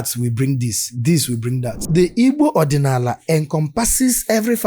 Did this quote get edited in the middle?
yes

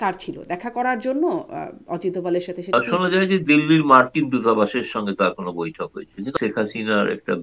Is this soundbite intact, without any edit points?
no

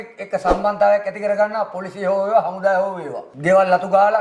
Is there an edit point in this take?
no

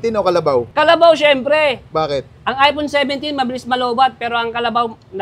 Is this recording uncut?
yes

